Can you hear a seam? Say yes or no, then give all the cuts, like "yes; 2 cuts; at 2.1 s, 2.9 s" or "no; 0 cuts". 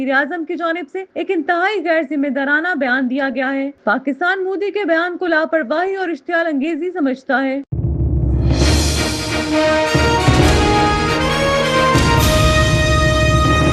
yes; 1 cut; at 7.7 s